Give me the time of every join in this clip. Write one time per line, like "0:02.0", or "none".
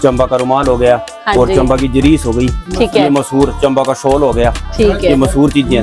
none